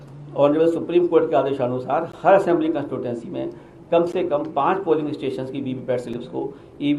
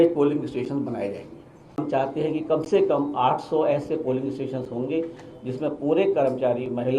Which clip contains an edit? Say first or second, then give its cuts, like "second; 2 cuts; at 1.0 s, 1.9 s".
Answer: second; 1 cut; at 1.8 s